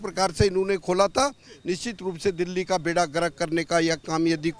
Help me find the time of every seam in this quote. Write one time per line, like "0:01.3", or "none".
none